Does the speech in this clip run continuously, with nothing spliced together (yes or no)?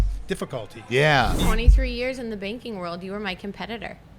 no